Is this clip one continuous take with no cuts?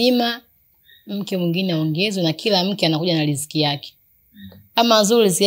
yes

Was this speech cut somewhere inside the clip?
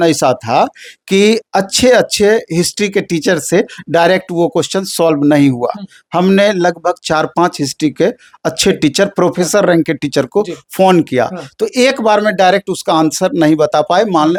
no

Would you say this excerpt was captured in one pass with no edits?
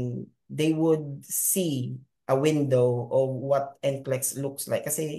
yes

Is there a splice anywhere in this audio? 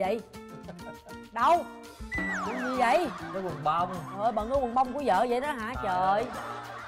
no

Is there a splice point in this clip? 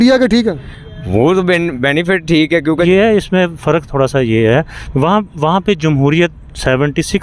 yes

